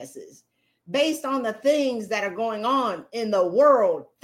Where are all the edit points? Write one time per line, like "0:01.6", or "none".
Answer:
none